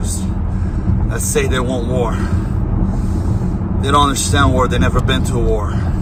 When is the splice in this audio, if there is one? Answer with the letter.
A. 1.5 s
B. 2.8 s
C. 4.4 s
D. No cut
D